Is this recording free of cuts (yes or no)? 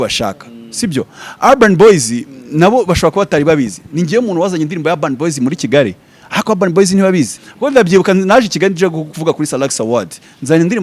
no